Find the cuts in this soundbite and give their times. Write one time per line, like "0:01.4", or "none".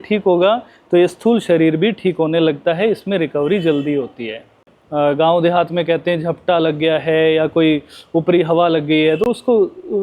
0:04.8